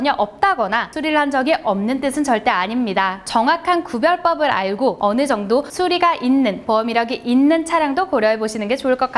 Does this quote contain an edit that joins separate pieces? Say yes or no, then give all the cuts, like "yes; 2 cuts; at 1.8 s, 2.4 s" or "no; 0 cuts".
yes; 3 cuts; at 0.9 s, 3.2 s, 5.0 s